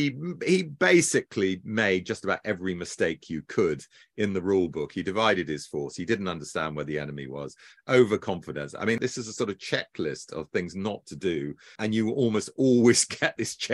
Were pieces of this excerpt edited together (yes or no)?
yes